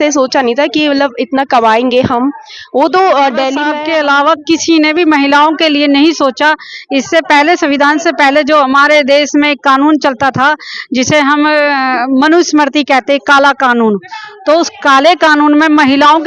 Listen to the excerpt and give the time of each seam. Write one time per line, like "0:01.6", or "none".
0:03.6

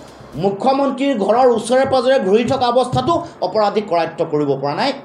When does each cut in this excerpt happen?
none

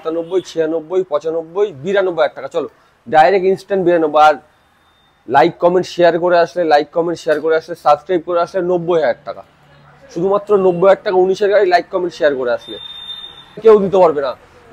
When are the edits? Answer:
0:13.6

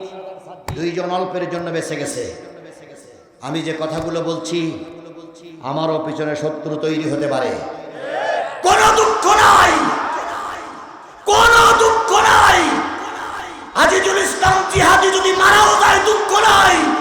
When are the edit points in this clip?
none

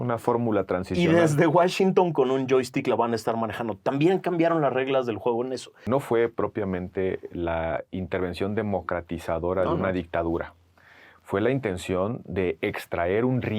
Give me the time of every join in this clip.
0:05.8

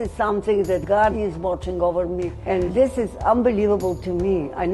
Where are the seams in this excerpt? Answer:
0:00.9
0:02.5

